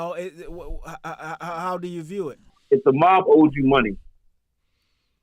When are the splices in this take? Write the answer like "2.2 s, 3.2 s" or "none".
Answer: 2.6 s